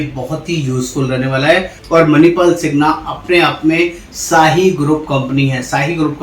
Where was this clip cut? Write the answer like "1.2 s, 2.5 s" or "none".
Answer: 1.8 s